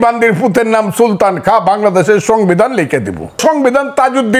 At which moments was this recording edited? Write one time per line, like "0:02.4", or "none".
0:03.4